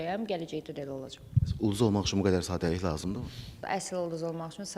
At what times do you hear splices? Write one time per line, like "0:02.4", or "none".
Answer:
0:03.7